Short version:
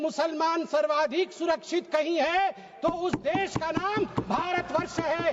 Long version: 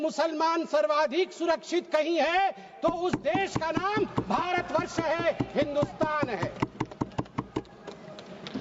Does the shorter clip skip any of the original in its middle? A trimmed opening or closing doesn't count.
no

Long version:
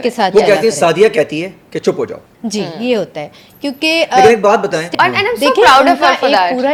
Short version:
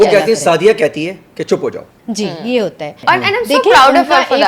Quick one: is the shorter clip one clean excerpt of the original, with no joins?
no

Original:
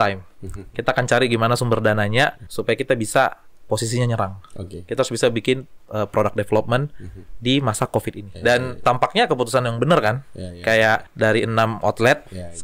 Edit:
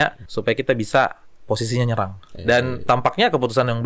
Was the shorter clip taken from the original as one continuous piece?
no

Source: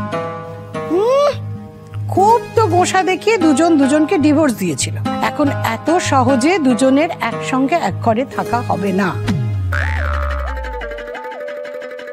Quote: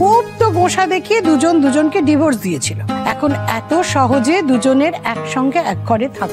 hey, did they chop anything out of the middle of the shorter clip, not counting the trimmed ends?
no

